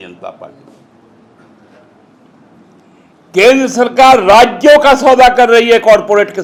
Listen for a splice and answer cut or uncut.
uncut